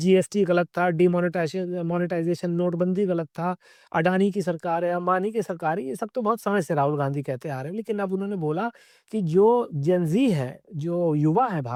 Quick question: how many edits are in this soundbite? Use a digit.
0